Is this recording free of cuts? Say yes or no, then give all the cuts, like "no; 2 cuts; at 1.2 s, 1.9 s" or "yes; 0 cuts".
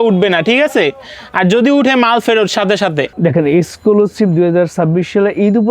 no; 1 cut; at 3.1 s